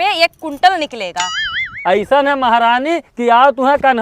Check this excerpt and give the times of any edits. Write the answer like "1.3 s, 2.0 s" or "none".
1.7 s